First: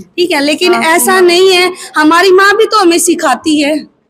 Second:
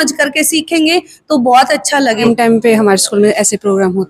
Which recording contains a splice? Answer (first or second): second